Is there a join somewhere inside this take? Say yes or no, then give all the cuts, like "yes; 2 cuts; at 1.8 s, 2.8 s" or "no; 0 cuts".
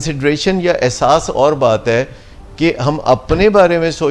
no; 0 cuts